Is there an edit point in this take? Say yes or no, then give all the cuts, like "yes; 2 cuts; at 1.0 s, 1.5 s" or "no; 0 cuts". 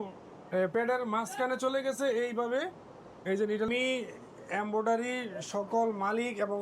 yes; 1 cut; at 3.7 s